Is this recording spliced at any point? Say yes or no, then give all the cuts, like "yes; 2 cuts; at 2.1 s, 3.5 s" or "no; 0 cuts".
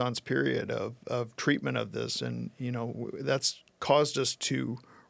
no; 0 cuts